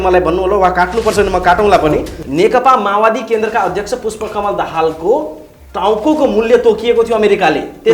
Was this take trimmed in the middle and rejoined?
yes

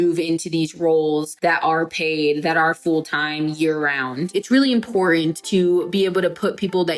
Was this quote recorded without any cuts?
no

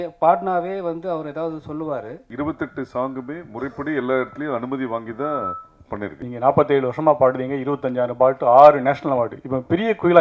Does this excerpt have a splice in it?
yes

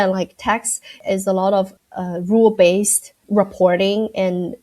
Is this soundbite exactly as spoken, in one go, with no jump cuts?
no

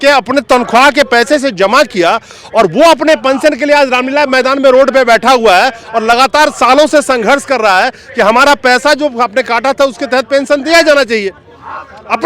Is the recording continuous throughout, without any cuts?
yes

